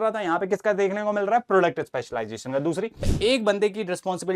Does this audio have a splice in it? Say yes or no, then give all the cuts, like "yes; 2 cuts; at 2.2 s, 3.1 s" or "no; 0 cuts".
yes; 1 cut; at 3.1 s